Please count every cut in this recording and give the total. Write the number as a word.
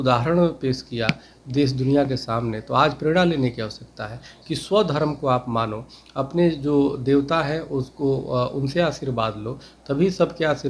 zero